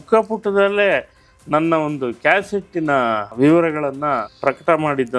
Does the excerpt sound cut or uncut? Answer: cut